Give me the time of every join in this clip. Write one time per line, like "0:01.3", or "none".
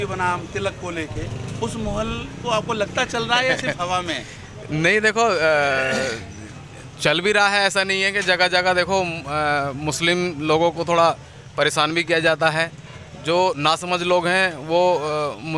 none